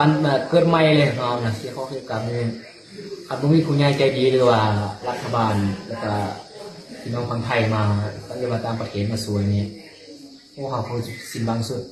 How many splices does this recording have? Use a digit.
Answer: 0